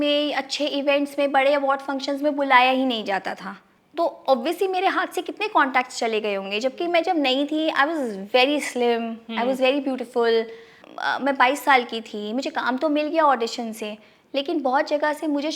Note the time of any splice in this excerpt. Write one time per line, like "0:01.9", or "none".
none